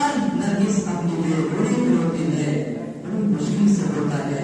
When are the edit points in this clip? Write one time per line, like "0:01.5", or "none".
none